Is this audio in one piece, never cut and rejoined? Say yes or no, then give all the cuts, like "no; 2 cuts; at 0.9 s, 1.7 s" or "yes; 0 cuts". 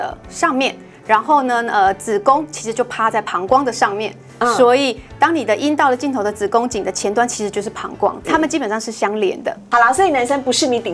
no; 2 cuts; at 8.3 s, 9.6 s